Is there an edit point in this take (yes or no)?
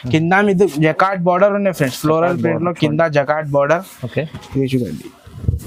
no